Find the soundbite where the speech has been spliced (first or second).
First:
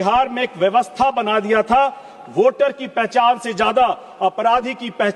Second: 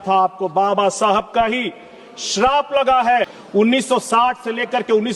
second